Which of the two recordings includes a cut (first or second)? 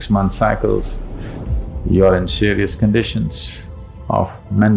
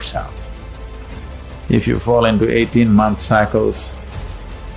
second